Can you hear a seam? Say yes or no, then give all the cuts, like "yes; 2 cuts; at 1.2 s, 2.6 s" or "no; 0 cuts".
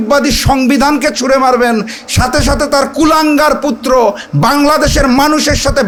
no; 0 cuts